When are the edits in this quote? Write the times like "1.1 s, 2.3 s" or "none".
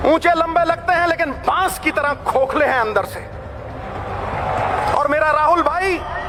none

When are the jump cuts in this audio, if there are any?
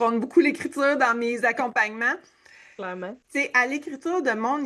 none

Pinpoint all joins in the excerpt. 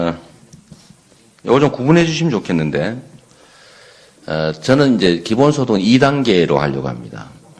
1.3 s

